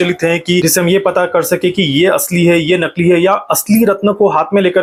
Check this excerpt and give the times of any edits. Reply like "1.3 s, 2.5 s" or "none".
none

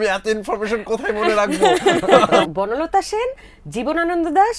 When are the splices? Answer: 2.5 s

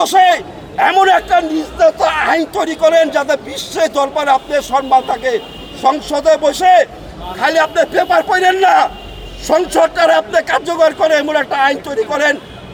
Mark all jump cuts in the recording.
none

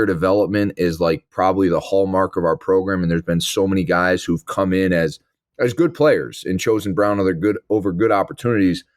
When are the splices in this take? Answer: none

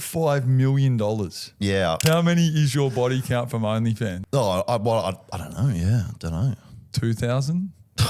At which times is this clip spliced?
2.0 s, 4.2 s

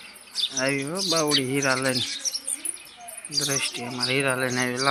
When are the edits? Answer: none

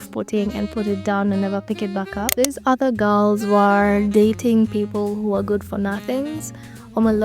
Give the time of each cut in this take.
2.3 s

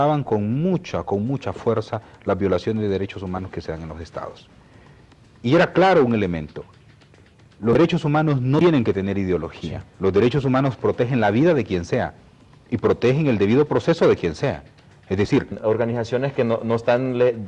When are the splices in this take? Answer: none

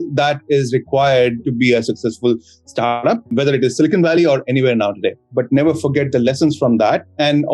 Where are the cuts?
5.3 s

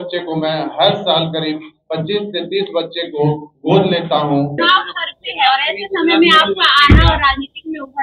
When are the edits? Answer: 4.5 s

